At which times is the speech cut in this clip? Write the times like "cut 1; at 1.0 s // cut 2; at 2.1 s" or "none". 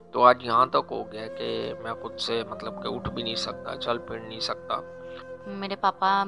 cut 1; at 5.3 s